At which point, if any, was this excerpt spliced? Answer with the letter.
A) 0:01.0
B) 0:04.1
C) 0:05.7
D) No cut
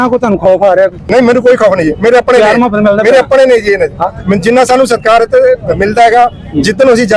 A